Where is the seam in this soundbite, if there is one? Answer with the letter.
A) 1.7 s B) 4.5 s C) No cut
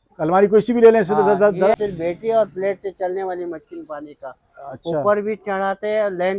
A